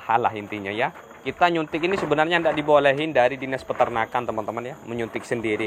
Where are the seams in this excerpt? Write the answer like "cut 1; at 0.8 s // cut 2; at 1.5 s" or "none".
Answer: cut 1; at 1.2 s